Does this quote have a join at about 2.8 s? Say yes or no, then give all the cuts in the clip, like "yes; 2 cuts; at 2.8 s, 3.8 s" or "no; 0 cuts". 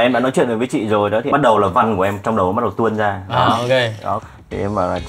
no; 2 cuts; at 1.3 s, 4.2 s